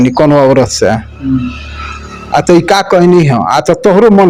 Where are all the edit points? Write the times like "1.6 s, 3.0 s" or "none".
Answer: none